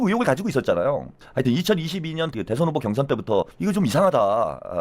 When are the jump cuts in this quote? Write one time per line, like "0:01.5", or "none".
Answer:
0:01.1
0:02.3
0:03.5